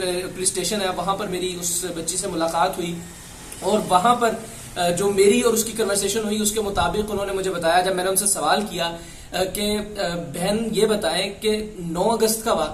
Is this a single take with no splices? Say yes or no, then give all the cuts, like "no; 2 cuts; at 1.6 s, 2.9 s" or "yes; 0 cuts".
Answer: yes; 0 cuts